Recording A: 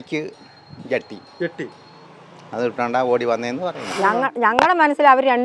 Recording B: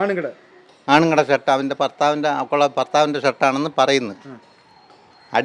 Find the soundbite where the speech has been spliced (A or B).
A